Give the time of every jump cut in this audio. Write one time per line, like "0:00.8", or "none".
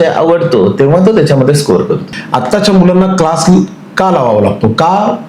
0:02.1